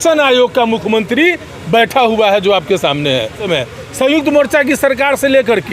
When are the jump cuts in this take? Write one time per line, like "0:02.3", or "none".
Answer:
0:03.5